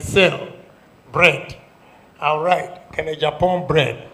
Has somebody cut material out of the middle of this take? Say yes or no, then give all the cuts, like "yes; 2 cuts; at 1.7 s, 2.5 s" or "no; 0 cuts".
no; 0 cuts